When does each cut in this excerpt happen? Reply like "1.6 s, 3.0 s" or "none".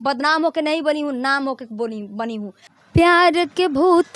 2.6 s